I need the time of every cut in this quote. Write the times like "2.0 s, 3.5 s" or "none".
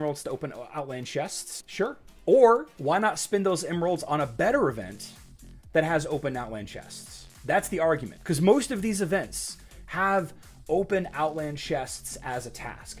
1.7 s, 2.7 s